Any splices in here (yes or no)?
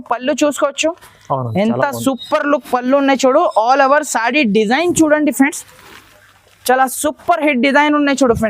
no